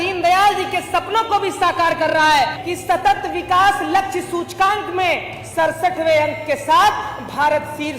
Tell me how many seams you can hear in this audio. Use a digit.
1